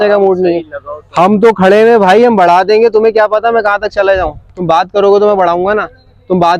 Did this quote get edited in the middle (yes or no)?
no